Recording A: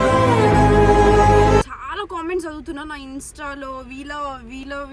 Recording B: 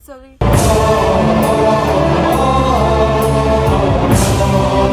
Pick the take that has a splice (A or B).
A